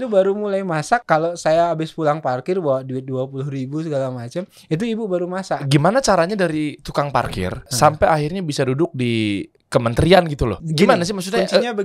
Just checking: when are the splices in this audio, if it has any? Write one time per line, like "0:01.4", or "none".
0:01.0
0:05.7
0:07.7
0:09.5
0:10.6